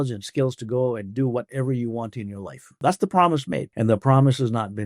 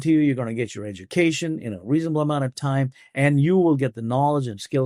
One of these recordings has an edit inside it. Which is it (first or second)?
first